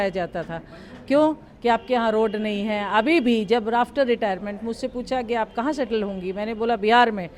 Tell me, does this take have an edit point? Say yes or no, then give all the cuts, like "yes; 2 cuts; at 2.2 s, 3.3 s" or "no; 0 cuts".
no; 0 cuts